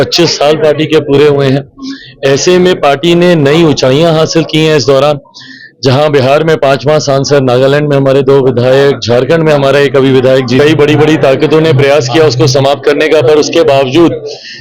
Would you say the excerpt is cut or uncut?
cut